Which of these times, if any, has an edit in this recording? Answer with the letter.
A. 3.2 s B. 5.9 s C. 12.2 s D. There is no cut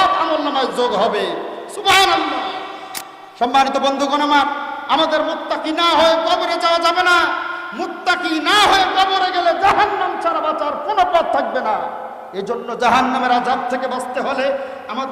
A